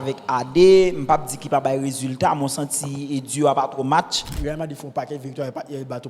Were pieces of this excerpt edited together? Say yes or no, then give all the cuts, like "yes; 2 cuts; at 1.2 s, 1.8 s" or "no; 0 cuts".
yes; 1 cut; at 4.4 s